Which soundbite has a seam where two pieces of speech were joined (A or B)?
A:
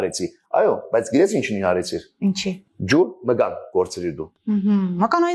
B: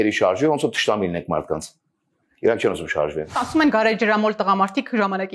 B